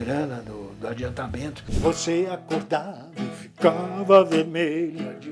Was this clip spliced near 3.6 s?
no; 1 cut; at 1.6 s

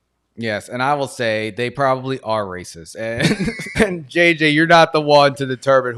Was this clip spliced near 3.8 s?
yes; 1 cut; at 3.8 s

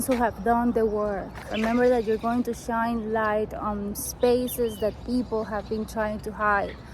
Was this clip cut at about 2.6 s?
no; 1 cut; at 1.4 s

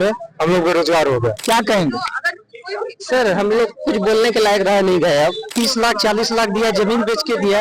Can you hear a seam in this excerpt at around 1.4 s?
yes; 2 cuts; at 1.4 s, 5.5 s

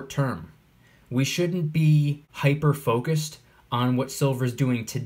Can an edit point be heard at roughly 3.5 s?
no; 1 cut; at 2.2 s

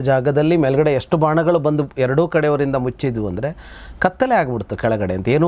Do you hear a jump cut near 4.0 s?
no; 0 cuts

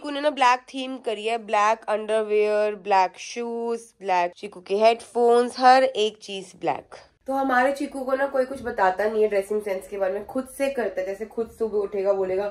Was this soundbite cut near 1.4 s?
no; 0 cuts

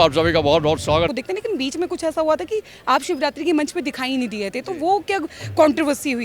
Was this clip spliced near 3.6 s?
no; 1 cut; at 1.1 s

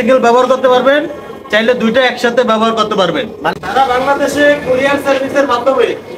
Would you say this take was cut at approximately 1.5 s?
no; 1 cut; at 3.5 s

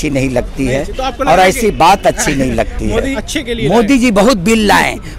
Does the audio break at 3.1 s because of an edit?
yes; 1 cut; at 3.1 s

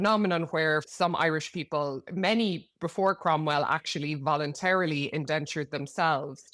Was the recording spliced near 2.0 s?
yes; 2 cuts; at 0.9 s, 2.0 s

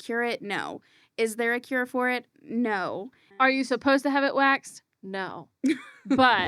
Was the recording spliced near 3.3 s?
yes; 1 cut; at 3.3 s

